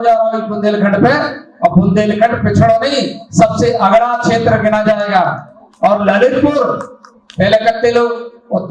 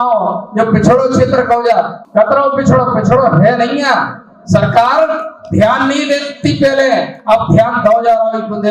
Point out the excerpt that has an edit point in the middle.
second; 1 cut; at 2.0 s

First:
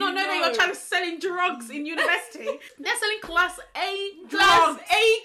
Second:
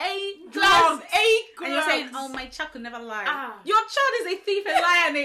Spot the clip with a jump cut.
first; 1 cut; at 2.6 s

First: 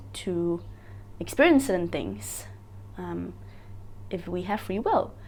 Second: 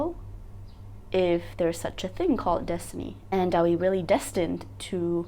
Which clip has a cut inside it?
second; 1 cut; at 3.2 s

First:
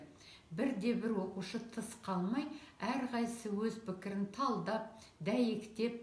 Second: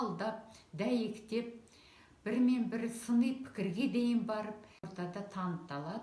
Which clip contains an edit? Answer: second; 1 cut; at 4.9 s

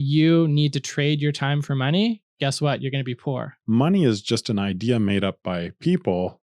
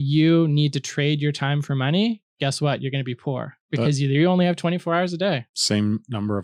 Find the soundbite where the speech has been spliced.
first; 1 cut; at 3.5 s

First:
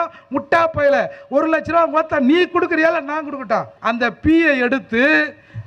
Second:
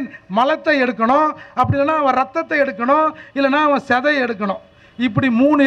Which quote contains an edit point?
first; 1 cut; at 3.7 s

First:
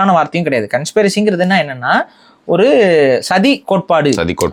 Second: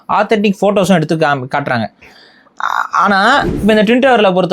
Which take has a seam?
second; 1 cut; at 3.5 s

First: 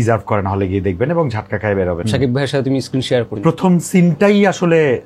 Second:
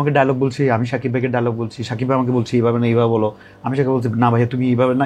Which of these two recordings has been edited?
first; 2 cuts; at 2.0 s, 3.3 s

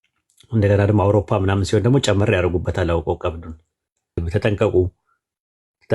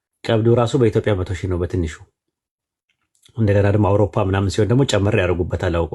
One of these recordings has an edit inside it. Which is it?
first; 1 cut; at 4.2 s

